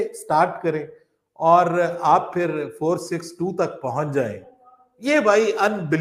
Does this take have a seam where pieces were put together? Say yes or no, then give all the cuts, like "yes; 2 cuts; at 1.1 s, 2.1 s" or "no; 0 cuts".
no; 0 cuts